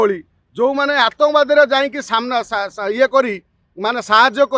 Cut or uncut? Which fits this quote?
uncut